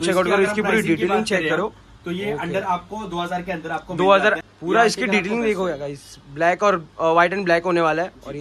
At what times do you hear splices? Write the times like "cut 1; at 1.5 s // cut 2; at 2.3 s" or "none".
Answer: cut 1; at 4.4 s